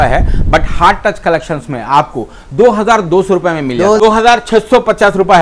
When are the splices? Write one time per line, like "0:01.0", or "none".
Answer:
0:04.0